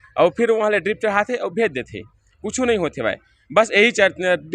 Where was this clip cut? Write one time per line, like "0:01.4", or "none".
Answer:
none